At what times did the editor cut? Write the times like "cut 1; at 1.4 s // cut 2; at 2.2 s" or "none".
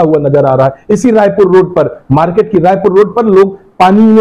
none